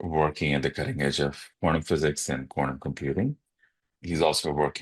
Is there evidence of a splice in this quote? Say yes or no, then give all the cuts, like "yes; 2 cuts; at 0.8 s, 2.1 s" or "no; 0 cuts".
yes; 2 cuts; at 1.4 s, 3.9 s